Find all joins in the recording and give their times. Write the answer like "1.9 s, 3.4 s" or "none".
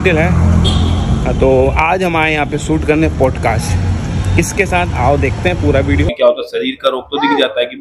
6.1 s